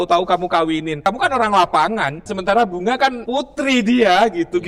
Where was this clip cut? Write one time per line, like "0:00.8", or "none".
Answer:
0:00.9
0:02.2
0:03.2